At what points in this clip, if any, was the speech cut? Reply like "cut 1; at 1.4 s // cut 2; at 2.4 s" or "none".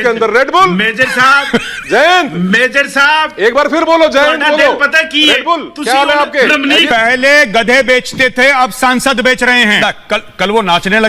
cut 1; at 6.9 s // cut 2; at 9.8 s